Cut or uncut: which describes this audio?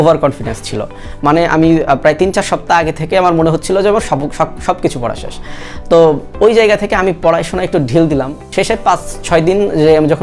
cut